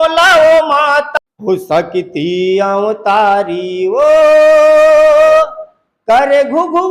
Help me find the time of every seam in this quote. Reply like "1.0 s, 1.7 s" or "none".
1.1 s